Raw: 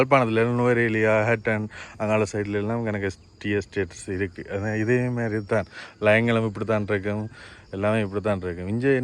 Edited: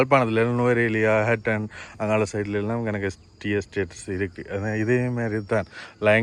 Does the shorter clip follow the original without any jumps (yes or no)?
yes